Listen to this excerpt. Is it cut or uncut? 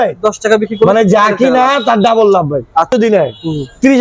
cut